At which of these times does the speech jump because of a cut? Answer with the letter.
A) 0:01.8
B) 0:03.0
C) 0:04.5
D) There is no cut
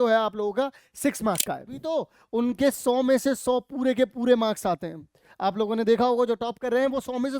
A